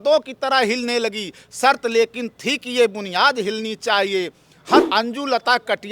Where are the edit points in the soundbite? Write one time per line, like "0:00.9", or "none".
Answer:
0:04.8